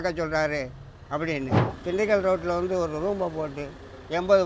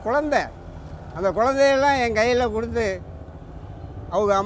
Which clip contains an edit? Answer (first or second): first